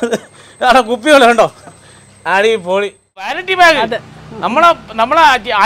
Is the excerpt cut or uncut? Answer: cut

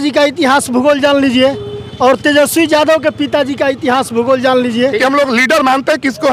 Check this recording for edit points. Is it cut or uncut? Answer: cut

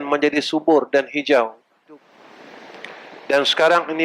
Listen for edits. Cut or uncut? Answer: cut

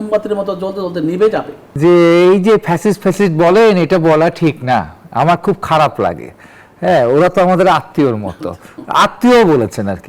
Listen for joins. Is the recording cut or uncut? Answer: cut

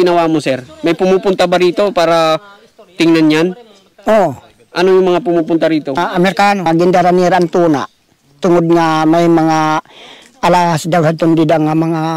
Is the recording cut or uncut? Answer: cut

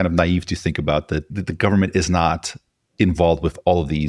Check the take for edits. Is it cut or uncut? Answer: cut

